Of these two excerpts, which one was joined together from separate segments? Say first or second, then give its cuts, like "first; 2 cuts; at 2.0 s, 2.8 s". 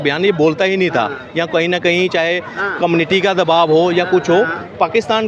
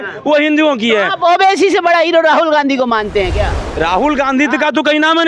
second; 1 cut; at 3.6 s